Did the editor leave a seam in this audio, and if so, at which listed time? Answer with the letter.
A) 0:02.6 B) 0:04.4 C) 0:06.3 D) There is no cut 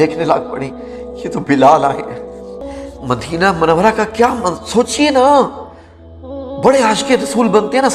A